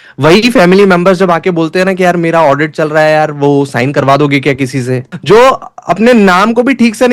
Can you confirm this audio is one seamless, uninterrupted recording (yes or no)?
no